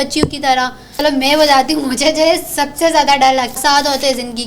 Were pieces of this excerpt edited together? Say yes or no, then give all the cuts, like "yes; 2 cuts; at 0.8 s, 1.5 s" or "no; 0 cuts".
yes; 2 cuts; at 1.0 s, 3.6 s